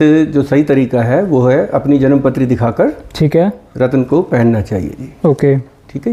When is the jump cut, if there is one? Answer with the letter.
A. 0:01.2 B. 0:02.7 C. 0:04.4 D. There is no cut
D